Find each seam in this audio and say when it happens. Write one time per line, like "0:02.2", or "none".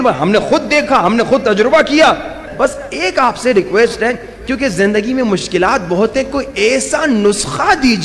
0:02.4